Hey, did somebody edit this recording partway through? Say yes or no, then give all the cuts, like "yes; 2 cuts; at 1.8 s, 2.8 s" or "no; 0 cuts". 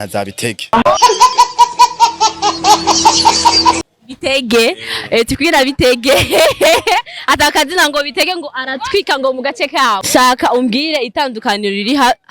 yes; 1 cut; at 10.0 s